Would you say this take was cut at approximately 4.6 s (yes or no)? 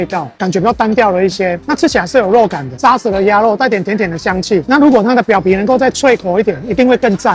yes